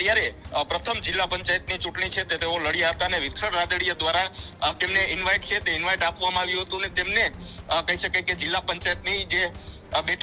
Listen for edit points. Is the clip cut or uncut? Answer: uncut